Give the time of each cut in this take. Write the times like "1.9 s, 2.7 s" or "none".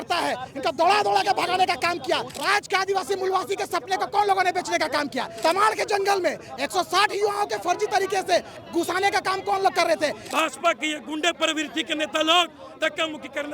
2.3 s, 5.3 s, 10.2 s